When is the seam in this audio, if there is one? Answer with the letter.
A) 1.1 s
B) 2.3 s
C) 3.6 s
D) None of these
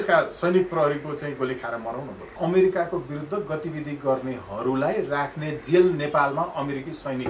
B